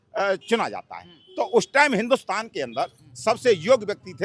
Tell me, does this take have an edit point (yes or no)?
no